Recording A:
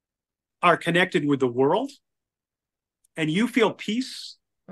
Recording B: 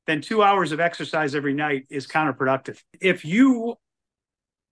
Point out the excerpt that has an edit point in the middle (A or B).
B